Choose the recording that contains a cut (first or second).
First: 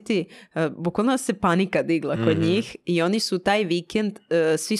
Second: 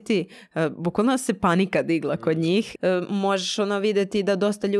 second